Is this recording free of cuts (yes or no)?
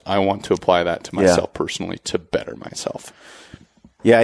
yes